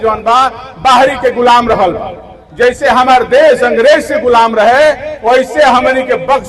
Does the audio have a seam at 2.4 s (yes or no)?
no